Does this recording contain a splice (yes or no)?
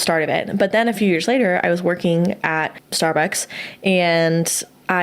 yes